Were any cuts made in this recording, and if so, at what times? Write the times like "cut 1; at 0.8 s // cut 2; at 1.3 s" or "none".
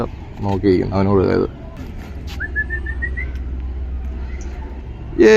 cut 1; at 1.8 s